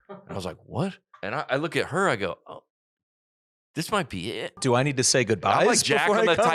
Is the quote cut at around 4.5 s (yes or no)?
yes